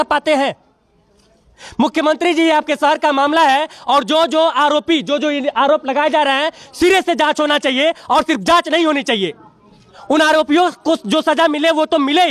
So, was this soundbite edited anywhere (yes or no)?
no